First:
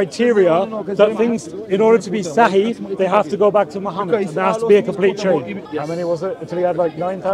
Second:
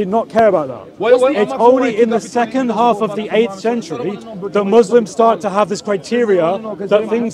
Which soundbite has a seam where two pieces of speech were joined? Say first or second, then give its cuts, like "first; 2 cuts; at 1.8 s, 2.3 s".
first; 1 cut; at 5.6 s